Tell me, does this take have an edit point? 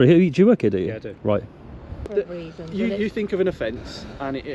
yes; 1 cut; at 2.1 s

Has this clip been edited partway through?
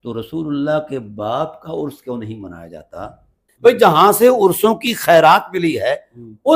yes; 1 cut; at 3.4 s

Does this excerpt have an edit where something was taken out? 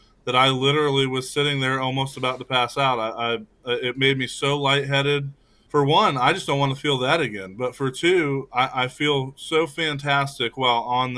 yes; 1 cut; at 5.5 s

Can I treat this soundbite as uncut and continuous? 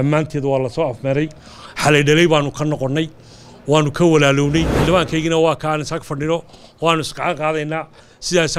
no; 1 cut; at 4.7 s

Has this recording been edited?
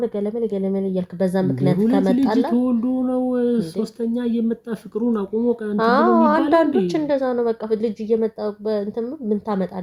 no; 0 cuts

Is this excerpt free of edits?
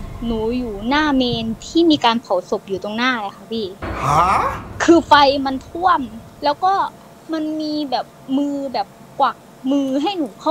yes; 0 cuts

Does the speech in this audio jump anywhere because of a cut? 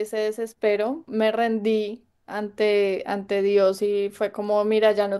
yes; 1 cut; at 1.1 s

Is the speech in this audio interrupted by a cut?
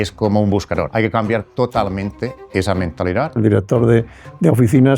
yes; 2 cuts; at 0.9 s, 3.4 s

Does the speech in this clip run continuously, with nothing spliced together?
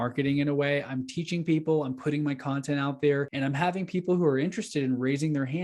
no; 1 cut; at 3.3 s

